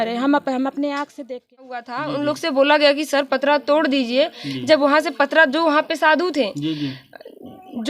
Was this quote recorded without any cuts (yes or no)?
no